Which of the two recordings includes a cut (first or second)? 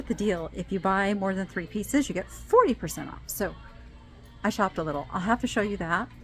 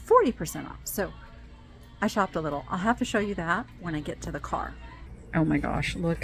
second